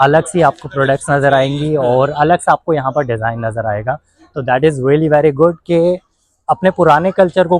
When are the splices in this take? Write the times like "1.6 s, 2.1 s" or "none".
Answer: none